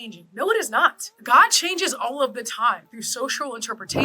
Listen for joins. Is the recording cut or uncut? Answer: cut